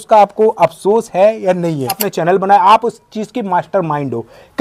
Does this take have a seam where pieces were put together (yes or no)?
yes